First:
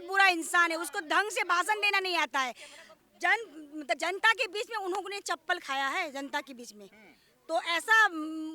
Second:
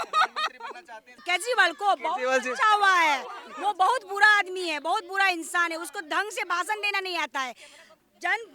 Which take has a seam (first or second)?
second